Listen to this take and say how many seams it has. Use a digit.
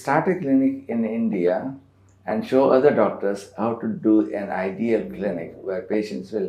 0